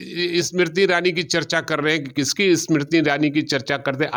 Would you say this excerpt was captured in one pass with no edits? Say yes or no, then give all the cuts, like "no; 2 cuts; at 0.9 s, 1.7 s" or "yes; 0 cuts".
yes; 0 cuts